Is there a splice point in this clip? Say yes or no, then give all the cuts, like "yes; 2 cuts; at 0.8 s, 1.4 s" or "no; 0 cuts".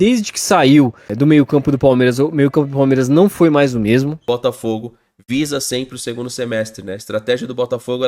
yes; 1 cut; at 4.2 s